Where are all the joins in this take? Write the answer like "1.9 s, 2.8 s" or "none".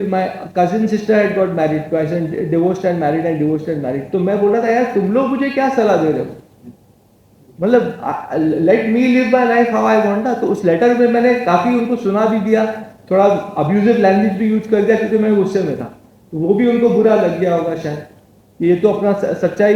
none

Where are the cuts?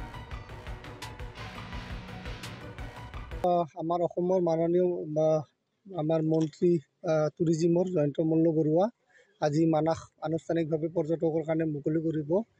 3.4 s

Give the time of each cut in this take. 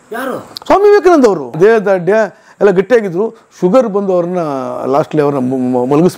1.5 s

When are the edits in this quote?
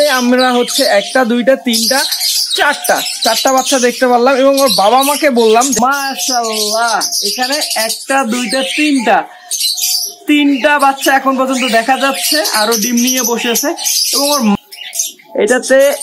5.8 s, 14.5 s

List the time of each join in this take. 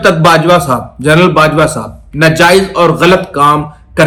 none

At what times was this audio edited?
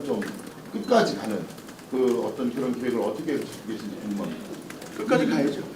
none

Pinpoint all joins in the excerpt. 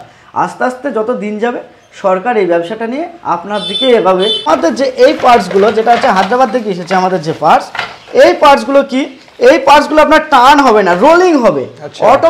4.5 s

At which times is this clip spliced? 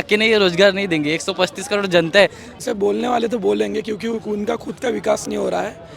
2.5 s

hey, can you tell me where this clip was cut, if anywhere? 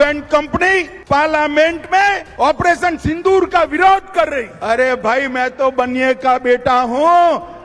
0.9 s, 2.2 s, 4.5 s

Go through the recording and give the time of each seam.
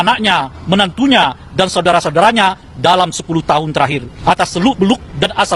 4.1 s

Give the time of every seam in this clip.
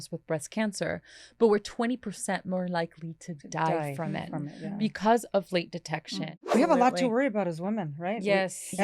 6.4 s

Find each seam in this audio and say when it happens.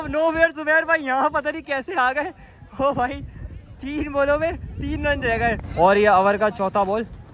5.7 s

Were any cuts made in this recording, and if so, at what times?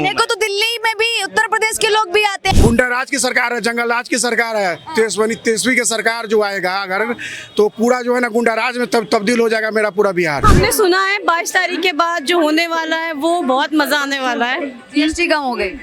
2.6 s, 10.4 s

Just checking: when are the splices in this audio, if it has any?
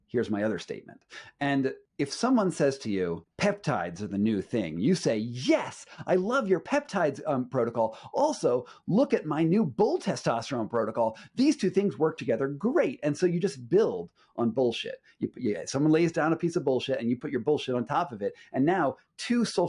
1.8 s, 3.3 s

